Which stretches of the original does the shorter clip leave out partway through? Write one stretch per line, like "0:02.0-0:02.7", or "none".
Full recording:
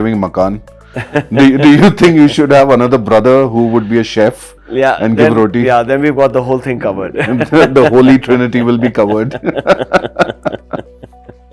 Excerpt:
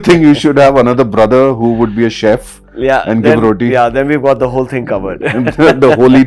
none